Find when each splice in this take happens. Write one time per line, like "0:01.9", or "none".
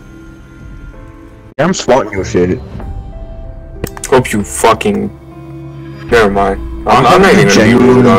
none